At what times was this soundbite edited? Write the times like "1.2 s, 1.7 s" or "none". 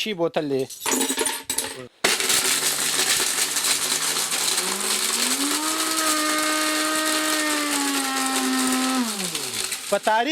1.7 s